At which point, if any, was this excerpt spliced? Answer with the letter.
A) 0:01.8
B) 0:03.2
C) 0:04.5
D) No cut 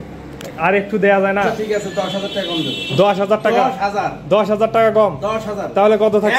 A